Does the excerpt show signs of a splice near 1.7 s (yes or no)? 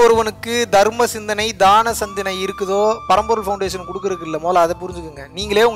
no